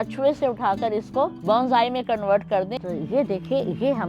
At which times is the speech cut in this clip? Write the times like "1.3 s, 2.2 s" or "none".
1.4 s, 2.7 s